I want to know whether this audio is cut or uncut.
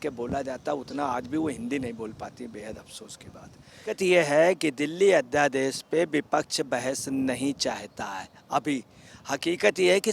cut